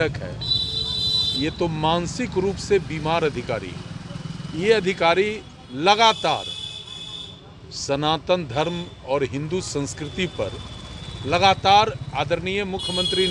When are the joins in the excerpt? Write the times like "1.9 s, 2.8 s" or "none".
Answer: none